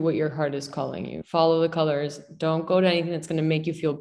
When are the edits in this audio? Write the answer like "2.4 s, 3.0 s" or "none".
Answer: none